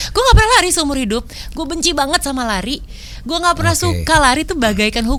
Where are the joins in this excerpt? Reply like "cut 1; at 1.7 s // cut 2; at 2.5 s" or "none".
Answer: none